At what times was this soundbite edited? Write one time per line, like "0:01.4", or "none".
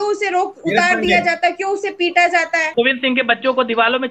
0:02.6